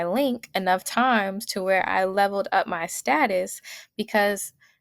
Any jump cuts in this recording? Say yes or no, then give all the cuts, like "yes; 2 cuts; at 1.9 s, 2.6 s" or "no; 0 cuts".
no; 0 cuts